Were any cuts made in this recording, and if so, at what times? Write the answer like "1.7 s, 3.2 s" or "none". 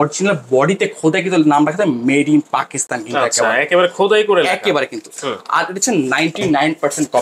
none